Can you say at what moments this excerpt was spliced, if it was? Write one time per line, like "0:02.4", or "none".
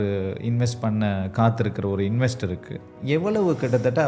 0:02.9